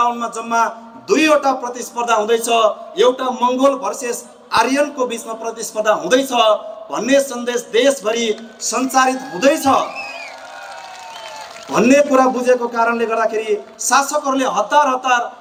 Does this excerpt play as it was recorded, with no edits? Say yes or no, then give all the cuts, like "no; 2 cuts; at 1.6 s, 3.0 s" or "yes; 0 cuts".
yes; 0 cuts